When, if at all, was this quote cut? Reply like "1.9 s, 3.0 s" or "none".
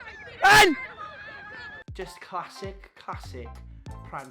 1.8 s

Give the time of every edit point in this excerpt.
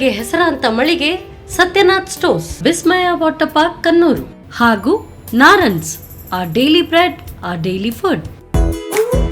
8.4 s

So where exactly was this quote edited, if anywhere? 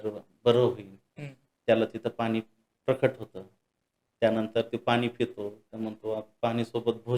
none

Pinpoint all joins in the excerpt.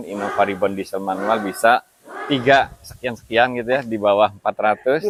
none

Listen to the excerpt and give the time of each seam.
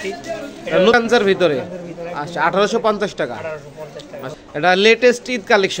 0.9 s, 4.3 s

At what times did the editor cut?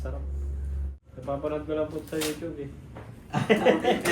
1.0 s

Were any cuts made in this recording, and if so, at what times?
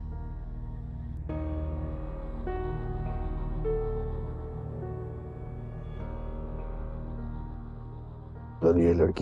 none

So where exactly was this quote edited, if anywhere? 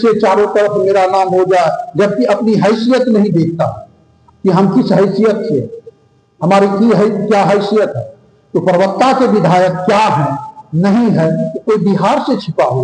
none

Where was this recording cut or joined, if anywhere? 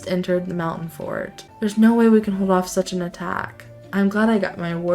1.4 s

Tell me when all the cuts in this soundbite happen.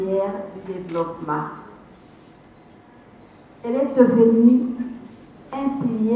none

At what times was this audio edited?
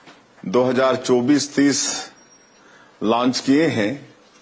none

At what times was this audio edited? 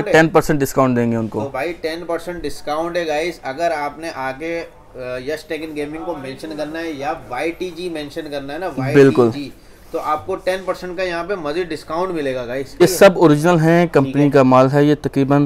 12.8 s

